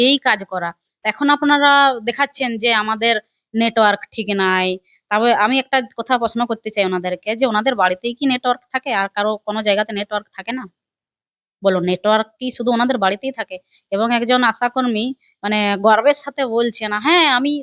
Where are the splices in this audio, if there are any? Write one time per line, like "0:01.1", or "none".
none